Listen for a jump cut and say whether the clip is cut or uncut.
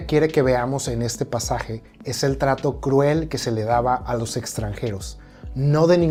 uncut